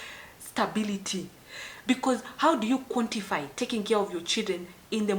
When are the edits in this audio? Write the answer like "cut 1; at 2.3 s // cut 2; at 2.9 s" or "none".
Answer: cut 1; at 1.2 s